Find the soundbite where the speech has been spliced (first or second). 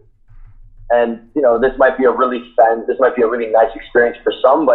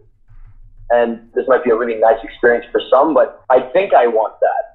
second